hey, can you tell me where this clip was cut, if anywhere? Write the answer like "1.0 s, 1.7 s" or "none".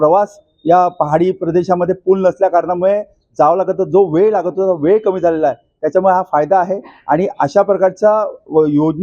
none